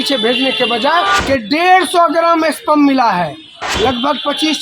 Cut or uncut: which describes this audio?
cut